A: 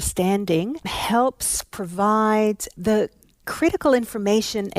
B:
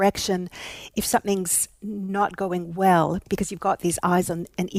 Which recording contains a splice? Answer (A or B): A